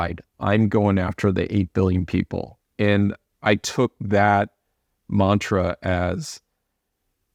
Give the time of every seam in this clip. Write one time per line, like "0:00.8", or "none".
none